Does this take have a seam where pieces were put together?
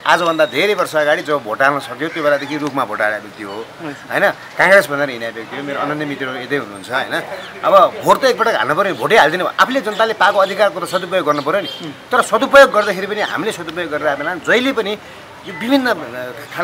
no; 0 cuts

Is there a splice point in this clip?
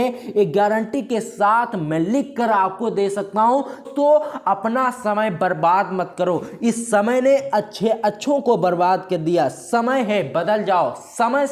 yes; 1 cut; at 3.8 s

